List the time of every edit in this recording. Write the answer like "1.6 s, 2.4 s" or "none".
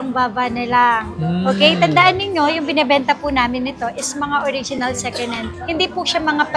none